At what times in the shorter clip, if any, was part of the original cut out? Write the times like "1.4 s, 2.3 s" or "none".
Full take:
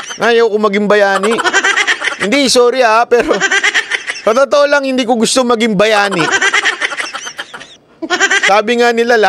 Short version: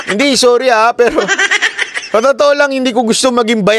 none